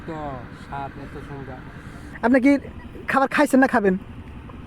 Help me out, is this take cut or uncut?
cut